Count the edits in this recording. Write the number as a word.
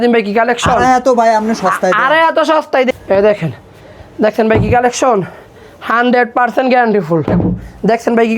two